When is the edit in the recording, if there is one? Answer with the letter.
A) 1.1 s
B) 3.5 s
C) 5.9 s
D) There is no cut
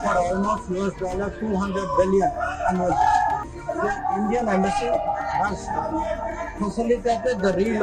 B